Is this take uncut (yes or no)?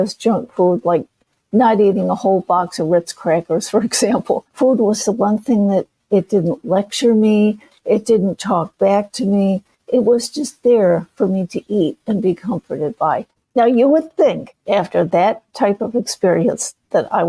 no